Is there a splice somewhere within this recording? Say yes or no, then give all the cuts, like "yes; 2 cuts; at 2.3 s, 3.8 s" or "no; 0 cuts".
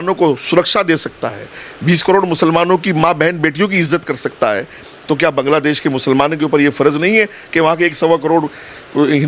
no; 0 cuts